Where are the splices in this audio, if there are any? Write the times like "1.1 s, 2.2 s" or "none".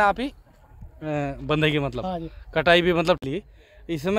3.2 s